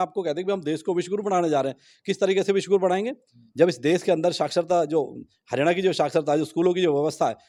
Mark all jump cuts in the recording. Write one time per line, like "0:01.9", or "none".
none

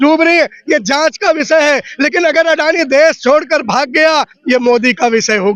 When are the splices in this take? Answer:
none

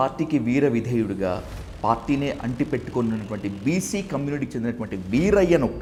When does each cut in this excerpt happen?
none

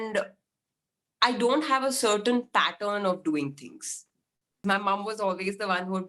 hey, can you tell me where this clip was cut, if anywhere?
0:04.6

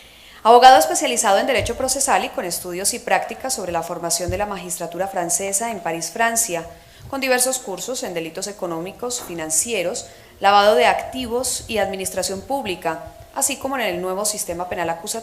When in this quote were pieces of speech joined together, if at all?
0:09.2

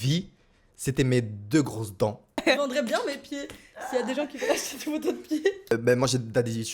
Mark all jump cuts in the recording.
0:02.4
0:05.7

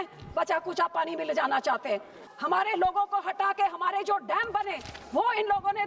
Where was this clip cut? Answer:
0:02.3

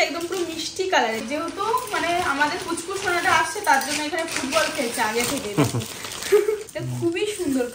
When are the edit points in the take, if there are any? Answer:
0:01.2
0:06.7

